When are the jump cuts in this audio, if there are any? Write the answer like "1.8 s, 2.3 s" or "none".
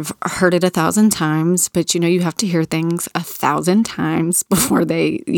none